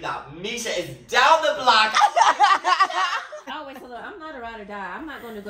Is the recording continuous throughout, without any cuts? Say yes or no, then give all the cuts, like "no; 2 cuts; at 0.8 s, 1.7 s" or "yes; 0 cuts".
no; 1 cut; at 3.4 s